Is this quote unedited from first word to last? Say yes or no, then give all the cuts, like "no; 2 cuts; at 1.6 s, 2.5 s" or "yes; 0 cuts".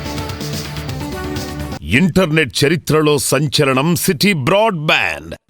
no; 1 cut; at 1.8 s